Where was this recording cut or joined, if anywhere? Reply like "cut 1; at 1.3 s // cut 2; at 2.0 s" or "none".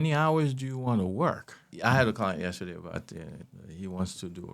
cut 1; at 1.7 s // cut 2; at 3.4 s

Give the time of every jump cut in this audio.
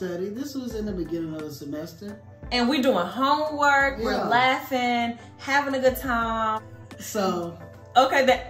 cut 1; at 6.6 s

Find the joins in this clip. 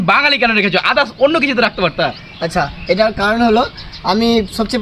none

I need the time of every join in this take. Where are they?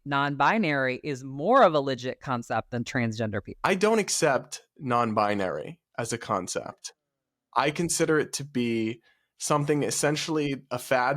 cut 1; at 3.7 s

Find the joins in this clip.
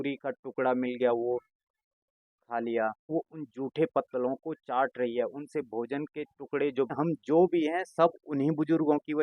cut 1; at 3.1 s // cut 2; at 6.9 s

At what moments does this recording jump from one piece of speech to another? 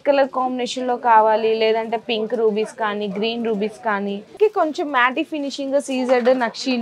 cut 1; at 4.3 s

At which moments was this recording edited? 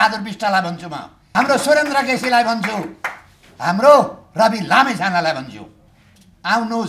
cut 1; at 1.1 s

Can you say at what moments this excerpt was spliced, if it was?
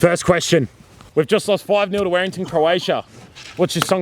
cut 1; at 1.0 s

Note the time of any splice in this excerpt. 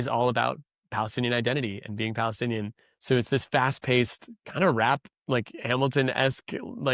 none

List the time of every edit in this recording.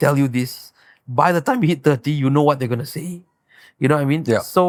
none

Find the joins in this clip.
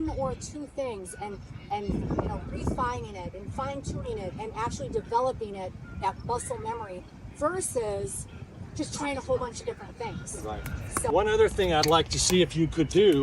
cut 1; at 11.1 s

